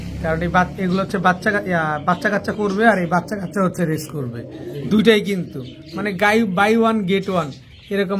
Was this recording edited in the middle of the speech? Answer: no; 0 cuts

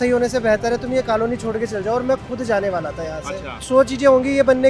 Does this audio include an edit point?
yes; 1 cut; at 3.6 s

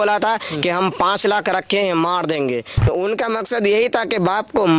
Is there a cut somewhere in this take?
yes; 1 cut; at 2.8 s

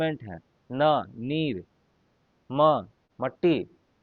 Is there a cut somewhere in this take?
yes; 1 cut; at 3.0 s

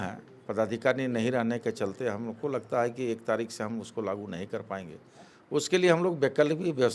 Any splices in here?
no; 0 cuts

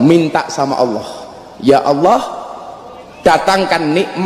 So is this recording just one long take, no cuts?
yes; 0 cuts

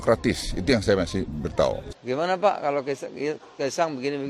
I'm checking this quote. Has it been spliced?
yes; 1 cut; at 1.9 s

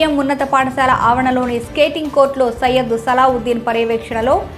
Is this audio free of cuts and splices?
yes; 0 cuts

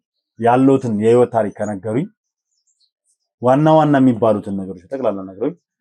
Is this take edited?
no; 0 cuts

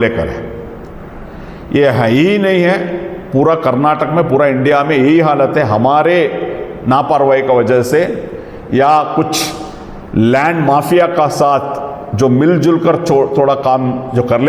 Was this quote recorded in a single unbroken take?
yes; 0 cuts

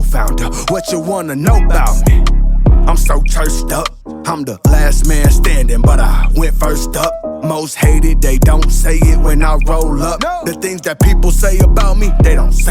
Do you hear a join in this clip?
no; 0 cuts

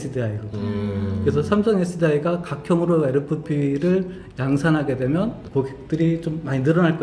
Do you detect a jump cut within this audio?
yes; 1 cut; at 5.8 s

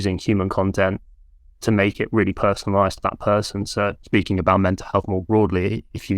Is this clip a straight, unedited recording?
no; 1 cut; at 4.0 s

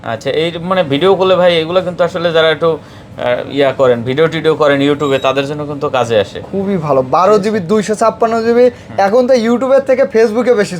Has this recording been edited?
no; 0 cuts

